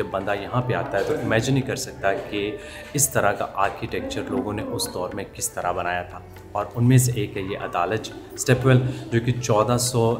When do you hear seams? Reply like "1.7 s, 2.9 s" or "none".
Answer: none